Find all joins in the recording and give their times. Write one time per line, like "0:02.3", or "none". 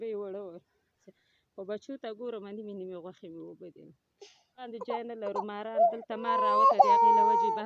0:00.8
0:04.7